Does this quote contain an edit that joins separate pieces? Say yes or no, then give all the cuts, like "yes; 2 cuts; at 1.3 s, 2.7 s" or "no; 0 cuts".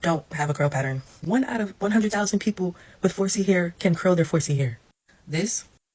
no; 0 cuts